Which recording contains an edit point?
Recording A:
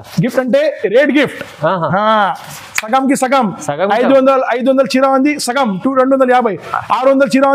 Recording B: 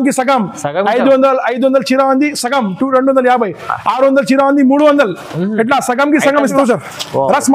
B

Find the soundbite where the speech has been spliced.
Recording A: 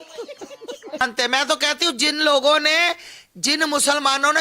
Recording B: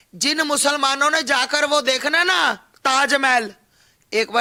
A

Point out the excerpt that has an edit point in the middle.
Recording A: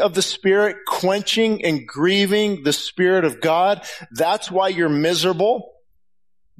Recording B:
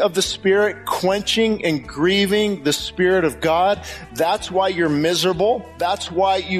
B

